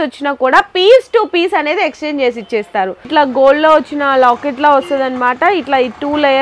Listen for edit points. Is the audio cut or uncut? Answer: cut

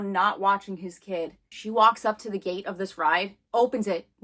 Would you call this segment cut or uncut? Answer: uncut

